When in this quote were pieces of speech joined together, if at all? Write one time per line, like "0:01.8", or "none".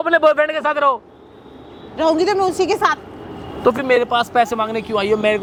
none